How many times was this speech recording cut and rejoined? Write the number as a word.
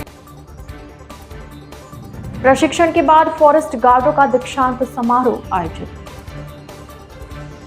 one